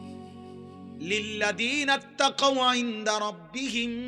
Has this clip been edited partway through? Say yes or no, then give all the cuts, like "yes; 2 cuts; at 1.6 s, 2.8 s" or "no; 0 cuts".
yes; 1 cut; at 1.0 s